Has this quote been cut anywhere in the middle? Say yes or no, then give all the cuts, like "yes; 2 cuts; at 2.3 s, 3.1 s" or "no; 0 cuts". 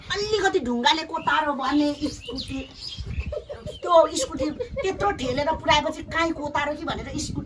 no; 0 cuts